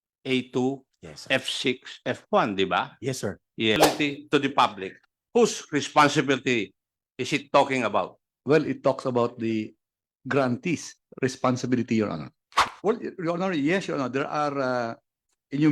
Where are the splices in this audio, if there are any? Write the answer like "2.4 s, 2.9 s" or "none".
3.8 s, 12.6 s